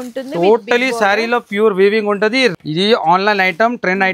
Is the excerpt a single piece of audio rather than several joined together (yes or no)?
no